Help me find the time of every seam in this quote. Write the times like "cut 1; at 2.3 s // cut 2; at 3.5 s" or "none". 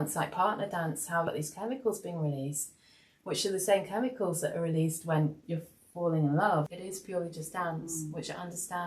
cut 1; at 1.3 s // cut 2; at 6.7 s